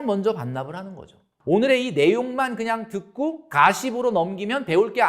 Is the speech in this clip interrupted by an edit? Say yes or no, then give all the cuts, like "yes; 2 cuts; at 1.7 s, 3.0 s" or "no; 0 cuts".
yes; 1 cut; at 1.3 s